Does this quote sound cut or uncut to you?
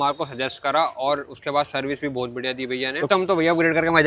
cut